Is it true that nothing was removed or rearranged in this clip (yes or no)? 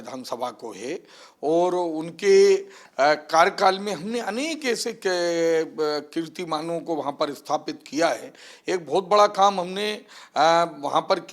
yes